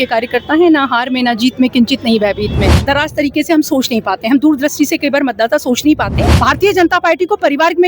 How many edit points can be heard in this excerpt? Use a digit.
2